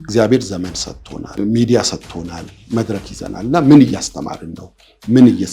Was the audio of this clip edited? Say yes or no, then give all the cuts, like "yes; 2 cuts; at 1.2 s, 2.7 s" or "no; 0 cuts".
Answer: yes; 2 cuts; at 1.4 s, 2.5 s